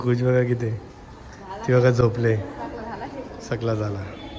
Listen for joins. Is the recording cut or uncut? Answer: uncut